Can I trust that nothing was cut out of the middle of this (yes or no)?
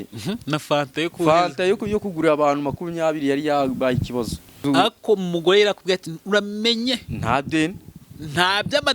no